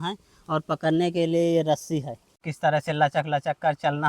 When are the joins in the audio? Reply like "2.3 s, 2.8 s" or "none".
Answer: 2.3 s